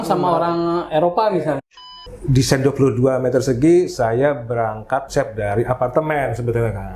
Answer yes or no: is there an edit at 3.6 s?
no